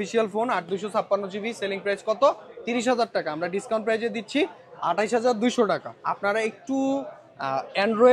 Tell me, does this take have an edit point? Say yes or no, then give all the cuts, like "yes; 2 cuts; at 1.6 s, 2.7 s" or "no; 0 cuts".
yes; 1 cut; at 6.0 s